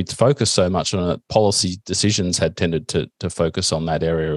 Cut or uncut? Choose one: uncut